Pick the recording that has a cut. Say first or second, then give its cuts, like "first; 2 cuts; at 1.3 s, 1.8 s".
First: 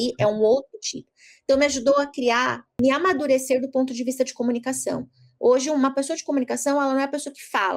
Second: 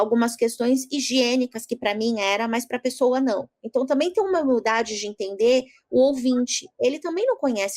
first; 1 cut; at 2.7 s